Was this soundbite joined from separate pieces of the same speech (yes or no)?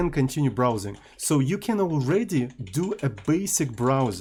no